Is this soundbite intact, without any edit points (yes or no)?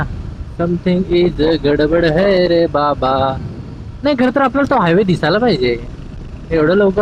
yes